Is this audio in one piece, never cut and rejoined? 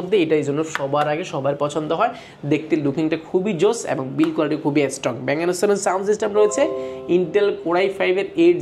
yes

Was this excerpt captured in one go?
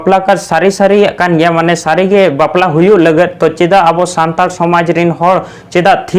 yes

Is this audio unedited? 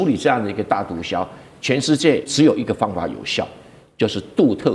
no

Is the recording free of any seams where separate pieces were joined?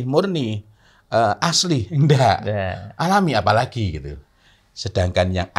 yes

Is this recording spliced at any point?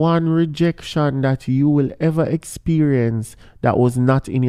no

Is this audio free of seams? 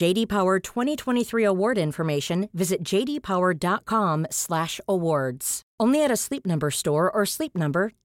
yes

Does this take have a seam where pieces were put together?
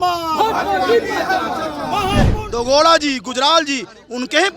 yes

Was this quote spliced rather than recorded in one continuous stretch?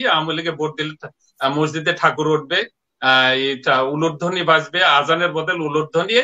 no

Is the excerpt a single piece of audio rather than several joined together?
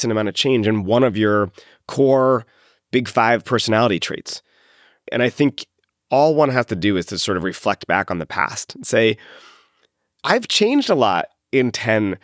yes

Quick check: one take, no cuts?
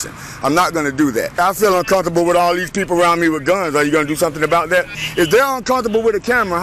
no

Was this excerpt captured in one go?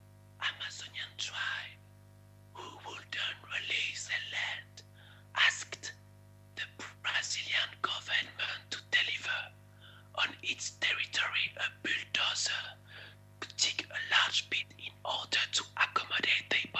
yes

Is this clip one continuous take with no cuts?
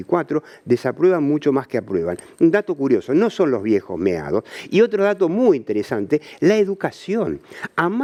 yes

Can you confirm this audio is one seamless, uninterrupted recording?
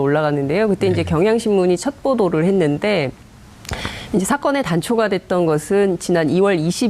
no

